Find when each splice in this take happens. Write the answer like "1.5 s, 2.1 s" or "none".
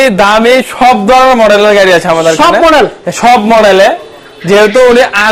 none